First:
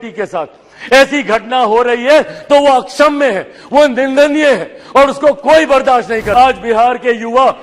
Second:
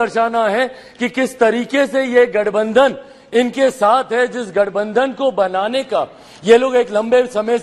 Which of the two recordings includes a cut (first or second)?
first